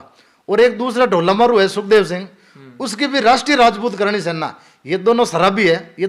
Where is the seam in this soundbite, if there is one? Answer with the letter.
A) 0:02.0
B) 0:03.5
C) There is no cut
C